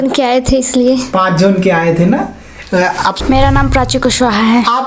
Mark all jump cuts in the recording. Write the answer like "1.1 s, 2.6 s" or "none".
3.2 s